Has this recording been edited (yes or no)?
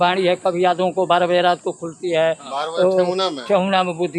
no